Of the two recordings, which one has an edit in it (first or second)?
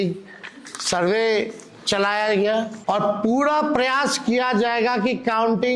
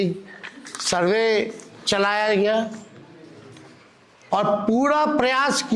first